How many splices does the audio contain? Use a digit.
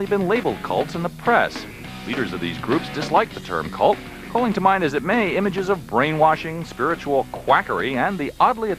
1